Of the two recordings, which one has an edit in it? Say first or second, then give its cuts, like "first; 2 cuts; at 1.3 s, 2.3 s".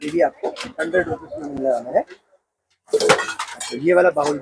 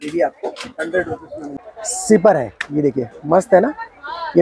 second; 1 cut; at 1.5 s